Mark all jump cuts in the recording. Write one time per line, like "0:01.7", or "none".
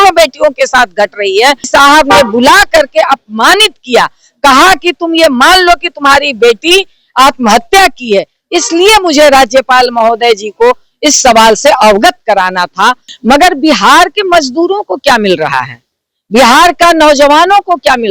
0:01.7
0:13.1